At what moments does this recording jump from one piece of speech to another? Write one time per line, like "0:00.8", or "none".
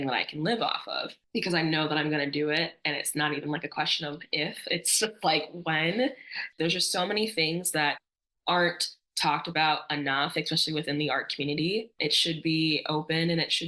0:06.4
0:11.9